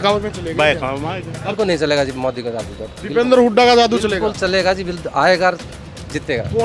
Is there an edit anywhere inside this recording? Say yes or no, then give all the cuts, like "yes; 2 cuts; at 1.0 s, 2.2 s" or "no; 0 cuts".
yes; 1 cut; at 1.5 s